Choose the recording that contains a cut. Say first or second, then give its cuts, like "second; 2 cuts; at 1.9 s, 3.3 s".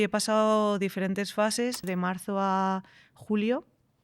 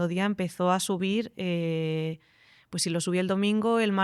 first; 1 cut; at 1.8 s